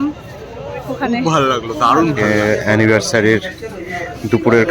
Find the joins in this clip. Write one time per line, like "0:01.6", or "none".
0:02.2